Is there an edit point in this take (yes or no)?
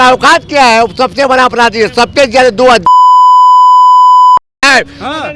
no